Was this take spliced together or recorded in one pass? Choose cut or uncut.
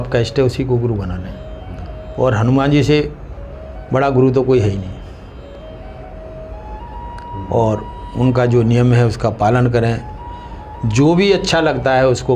uncut